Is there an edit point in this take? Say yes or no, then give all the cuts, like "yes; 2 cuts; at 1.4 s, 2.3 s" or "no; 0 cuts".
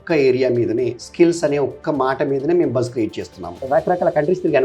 yes; 1 cut; at 3.5 s